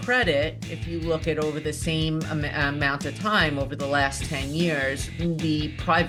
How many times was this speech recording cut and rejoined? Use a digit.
0